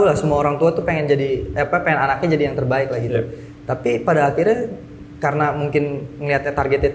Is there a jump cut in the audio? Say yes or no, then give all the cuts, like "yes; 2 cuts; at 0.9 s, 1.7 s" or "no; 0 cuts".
no; 0 cuts